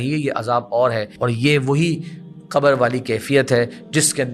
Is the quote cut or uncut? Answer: cut